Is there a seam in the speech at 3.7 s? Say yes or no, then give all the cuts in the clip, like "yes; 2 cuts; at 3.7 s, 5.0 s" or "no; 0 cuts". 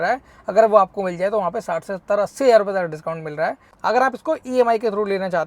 yes; 1 cut; at 3.7 s